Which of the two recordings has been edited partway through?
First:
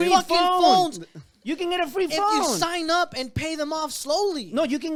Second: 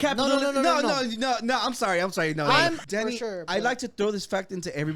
second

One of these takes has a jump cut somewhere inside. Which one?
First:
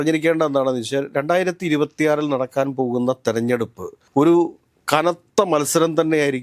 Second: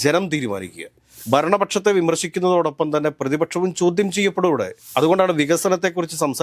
second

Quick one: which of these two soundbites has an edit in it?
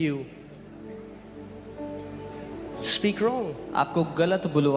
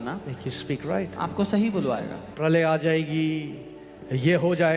second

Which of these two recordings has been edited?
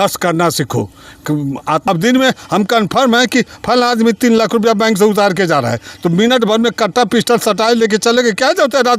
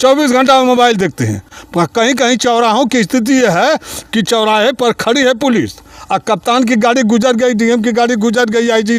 first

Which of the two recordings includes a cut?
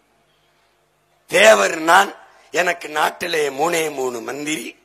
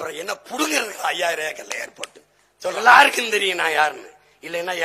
second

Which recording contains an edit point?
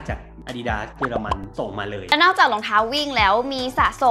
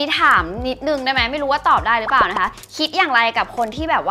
first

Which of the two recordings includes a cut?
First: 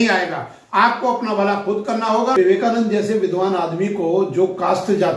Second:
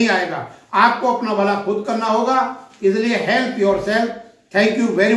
first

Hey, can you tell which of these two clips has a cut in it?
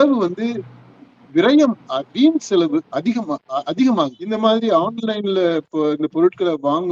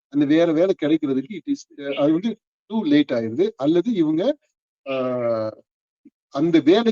first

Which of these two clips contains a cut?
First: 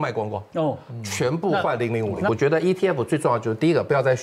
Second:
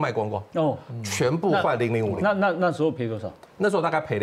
first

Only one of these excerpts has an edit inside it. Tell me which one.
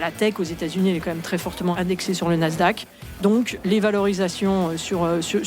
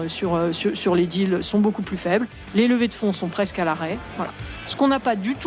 first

